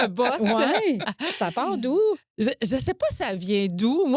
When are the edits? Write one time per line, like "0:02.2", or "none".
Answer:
none